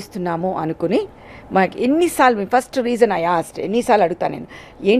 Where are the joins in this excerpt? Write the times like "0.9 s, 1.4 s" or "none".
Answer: none